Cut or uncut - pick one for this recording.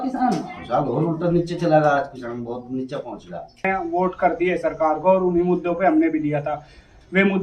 cut